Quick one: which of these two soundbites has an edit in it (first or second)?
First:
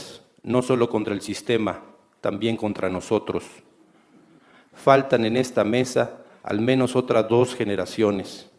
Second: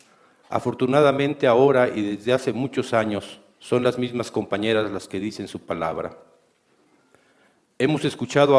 second